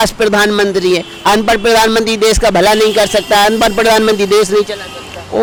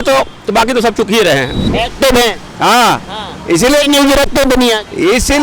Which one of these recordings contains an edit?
second; 1 cut; at 1.6 s

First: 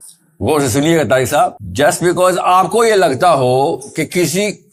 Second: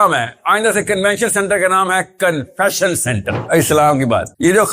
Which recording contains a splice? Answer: second; 1 cut; at 3.4 s

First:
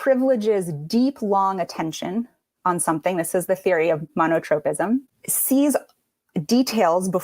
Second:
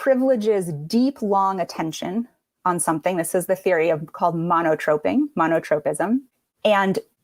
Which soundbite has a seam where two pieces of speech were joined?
first; 2 cuts; at 4.1 s, 5.2 s

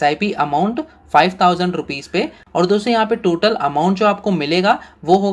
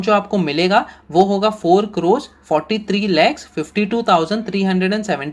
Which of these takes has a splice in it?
first; 1 cut; at 2.4 s

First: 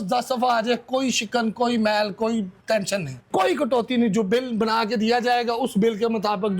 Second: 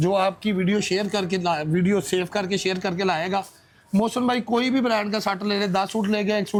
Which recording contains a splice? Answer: first; 1 cut; at 3.3 s

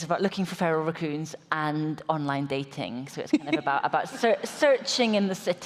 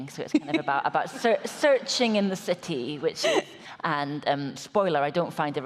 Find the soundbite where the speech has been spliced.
second; 1 cut; at 3.6 s

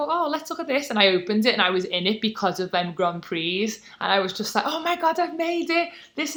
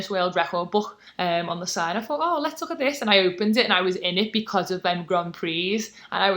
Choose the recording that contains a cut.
second; 1 cut; at 1.0 s

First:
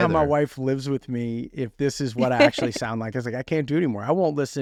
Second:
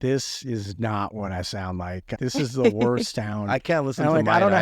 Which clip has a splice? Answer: second; 1 cut; at 2.2 s

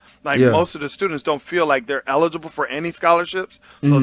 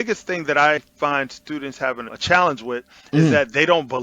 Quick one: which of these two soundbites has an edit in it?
second; 2 cuts; at 0.8 s, 2.1 s

